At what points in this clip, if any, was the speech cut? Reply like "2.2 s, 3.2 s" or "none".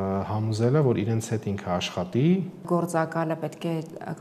2.7 s